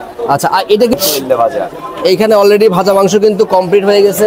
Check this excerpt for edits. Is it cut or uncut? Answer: cut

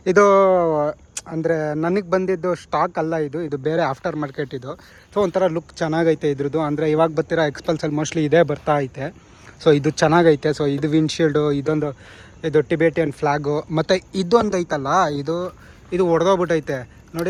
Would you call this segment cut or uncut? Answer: uncut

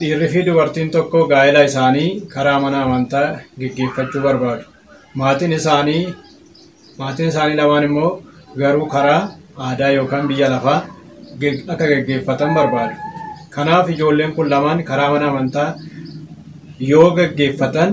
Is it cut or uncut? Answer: uncut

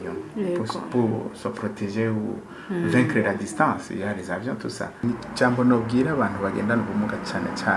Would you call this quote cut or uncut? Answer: cut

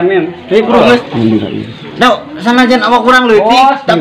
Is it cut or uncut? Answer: cut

